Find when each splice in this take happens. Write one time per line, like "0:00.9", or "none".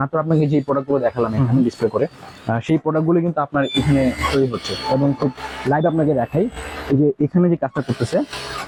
none